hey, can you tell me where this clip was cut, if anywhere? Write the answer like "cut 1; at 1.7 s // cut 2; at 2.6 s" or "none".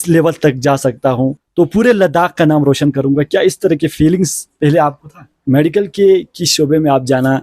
cut 1; at 1.4 s // cut 2; at 5.3 s